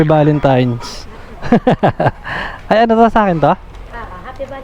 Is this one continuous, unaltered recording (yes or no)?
yes